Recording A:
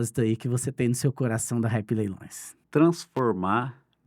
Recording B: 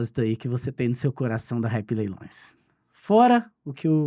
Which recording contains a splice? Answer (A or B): A